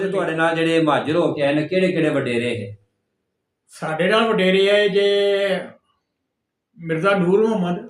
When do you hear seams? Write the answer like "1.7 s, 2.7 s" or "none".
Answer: none